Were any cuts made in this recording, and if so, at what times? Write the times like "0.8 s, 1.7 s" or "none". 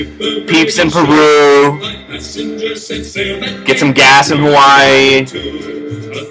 none